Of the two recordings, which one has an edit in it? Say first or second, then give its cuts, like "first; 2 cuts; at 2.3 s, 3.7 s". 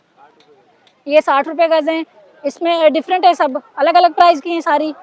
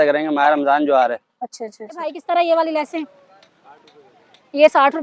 second; 1 cut; at 2.2 s